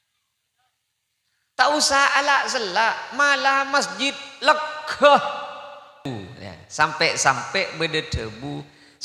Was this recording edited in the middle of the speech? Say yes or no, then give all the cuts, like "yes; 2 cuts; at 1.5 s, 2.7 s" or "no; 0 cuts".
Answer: yes; 1 cut; at 6.1 s